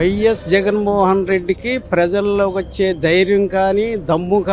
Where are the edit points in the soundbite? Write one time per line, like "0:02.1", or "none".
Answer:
none